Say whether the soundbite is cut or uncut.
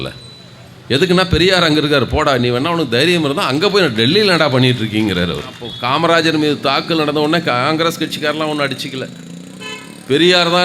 cut